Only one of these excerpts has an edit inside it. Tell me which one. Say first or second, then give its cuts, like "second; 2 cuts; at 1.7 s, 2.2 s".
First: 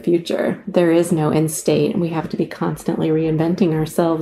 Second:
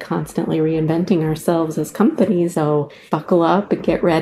second; 1 cut; at 2.6 s